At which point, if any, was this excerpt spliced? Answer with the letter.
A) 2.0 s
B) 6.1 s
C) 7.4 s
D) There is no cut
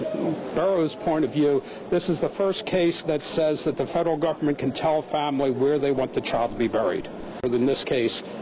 C